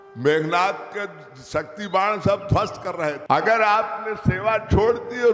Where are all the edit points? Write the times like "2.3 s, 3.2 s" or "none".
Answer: 3.2 s